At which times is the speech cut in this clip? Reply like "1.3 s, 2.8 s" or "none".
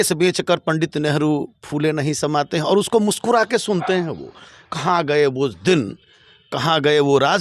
none